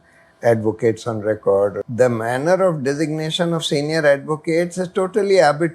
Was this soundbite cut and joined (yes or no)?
yes